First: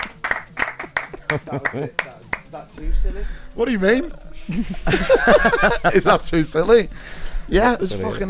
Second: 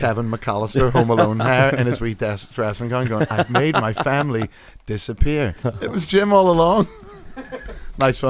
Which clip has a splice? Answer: second; 1 cut; at 5.6 s

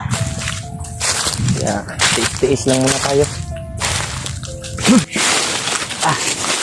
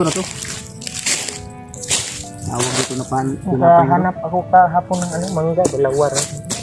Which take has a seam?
first; 1 cut; at 5.1 s

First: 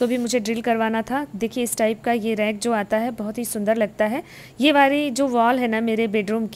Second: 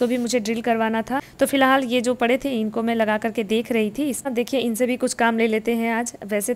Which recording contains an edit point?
second; 2 cuts; at 1.3 s, 4.3 s

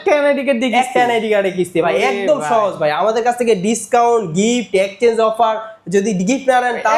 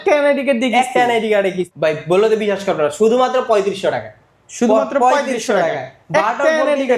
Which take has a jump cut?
second; 1 cut; at 1.6 s

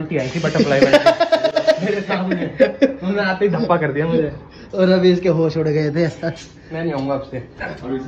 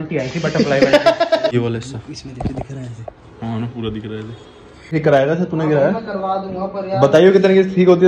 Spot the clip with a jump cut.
second; 2 cuts; at 1.5 s, 4.9 s

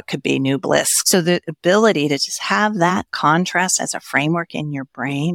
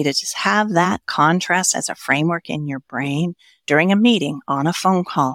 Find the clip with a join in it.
first; 1 cut; at 1.0 s

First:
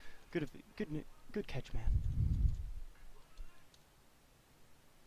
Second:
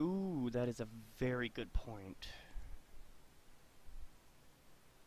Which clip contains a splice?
second; 1 cut; at 1.4 s

